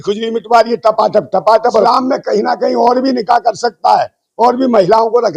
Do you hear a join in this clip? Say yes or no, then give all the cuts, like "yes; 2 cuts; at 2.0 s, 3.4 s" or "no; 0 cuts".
yes; 1 cut; at 1.8 s